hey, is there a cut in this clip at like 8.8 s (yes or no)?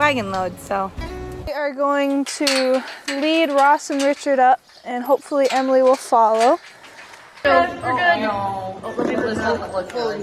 no